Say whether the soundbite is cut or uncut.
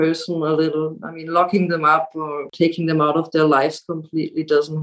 cut